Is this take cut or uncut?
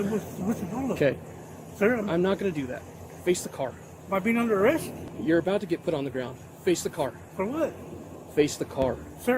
cut